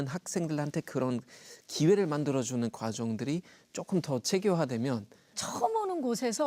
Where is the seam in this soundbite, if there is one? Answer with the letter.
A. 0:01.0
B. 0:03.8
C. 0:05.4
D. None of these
C